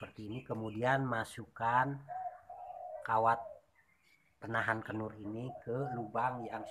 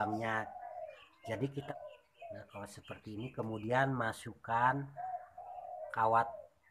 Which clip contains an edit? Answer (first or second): second